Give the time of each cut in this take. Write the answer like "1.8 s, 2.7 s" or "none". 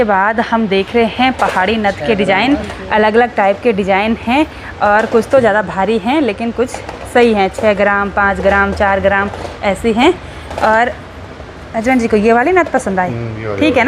none